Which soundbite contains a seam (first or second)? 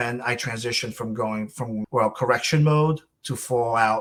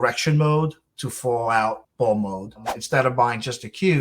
second